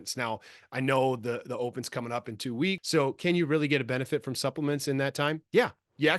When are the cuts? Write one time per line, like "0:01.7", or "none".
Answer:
0:02.8